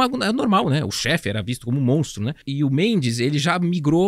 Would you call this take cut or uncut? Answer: cut